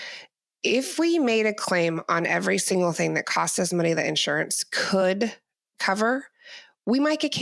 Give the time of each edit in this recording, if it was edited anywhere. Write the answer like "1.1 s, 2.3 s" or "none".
none